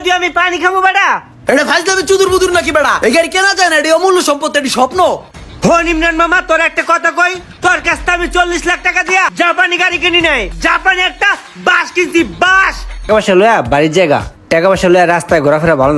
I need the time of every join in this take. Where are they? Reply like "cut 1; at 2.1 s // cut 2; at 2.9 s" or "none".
cut 1; at 10.5 s // cut 2; at 13.1 s